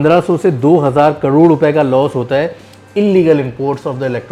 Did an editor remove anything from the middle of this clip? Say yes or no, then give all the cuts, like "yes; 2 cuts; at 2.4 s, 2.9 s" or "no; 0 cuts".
no; 0 cuts